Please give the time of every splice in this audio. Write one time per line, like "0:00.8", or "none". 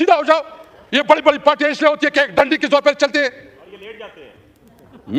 none